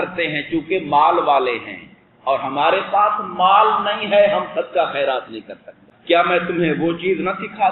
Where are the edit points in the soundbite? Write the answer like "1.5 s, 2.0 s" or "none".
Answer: 5.9 s

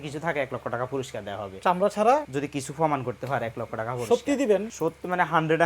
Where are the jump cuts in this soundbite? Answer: 2.3 s, 4.7 s

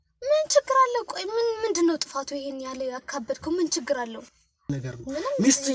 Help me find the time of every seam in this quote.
4.8 s

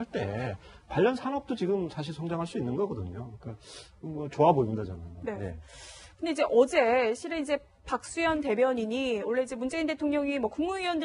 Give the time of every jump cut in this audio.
2.0 s

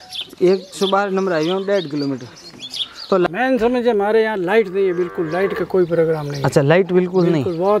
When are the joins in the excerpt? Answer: 3.3 s

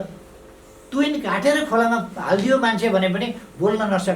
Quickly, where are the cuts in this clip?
none

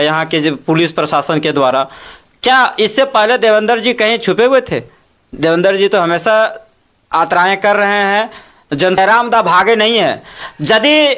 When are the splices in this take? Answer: 9.0 s

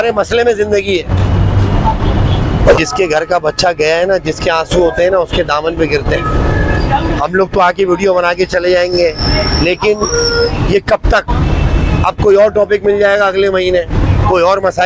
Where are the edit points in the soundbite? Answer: 2.8 s

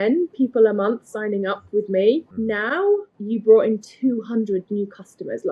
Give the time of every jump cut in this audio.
2.9 s

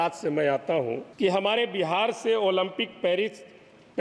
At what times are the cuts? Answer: 1.1 s

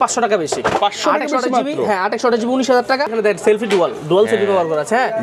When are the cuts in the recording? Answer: 3.1 s

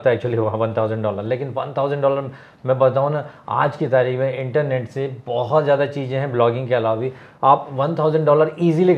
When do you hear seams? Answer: none

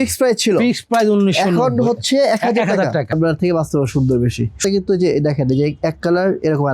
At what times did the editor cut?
3.1 s, 4.5 s

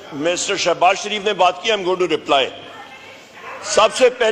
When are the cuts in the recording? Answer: none

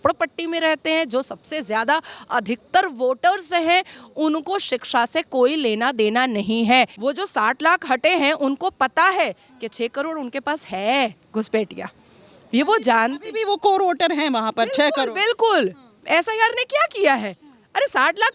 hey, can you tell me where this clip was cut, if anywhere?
6.9 s

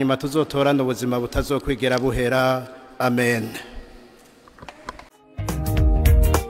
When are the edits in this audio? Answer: 5.2 s

